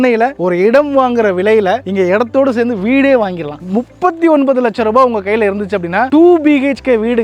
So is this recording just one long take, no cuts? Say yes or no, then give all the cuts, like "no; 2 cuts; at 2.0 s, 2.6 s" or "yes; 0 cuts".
no; 1 cut; at 3.6 s